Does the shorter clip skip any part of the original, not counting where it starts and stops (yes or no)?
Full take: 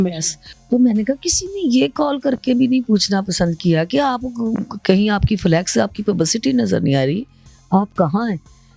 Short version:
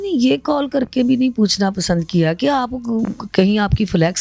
no